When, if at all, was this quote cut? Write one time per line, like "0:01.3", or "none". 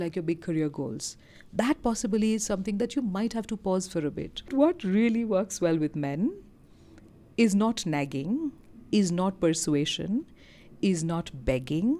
0:04.5